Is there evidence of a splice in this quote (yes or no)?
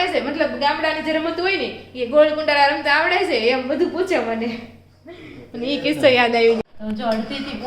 yes